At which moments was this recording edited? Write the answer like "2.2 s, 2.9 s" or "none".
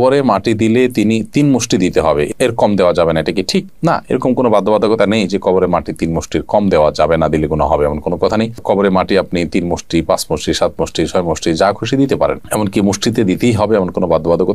none